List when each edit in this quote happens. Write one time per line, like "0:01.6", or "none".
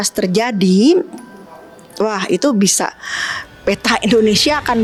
none